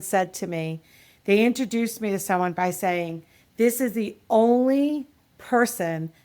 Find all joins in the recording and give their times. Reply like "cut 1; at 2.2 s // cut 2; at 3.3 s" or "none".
none